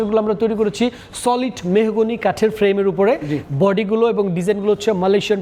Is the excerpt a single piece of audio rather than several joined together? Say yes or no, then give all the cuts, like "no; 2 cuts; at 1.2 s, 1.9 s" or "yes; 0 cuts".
yes; 0 cuts